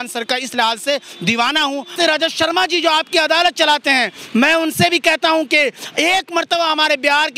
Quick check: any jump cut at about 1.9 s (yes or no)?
yes